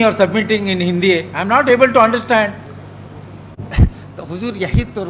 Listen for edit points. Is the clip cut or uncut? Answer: uncut